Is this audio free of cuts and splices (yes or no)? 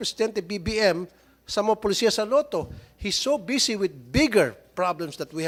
yes